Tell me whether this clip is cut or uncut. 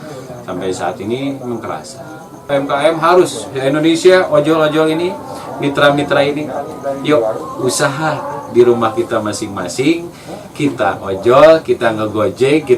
cut